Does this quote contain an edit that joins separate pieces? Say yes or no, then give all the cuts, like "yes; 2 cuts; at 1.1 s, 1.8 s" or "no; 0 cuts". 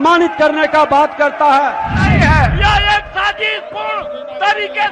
yes; 1 cut; at 2.1 s